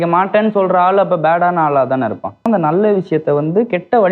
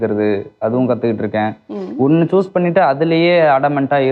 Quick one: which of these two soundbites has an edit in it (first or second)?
first